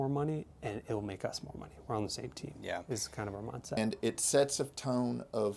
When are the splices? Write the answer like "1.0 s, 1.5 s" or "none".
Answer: 3.8 s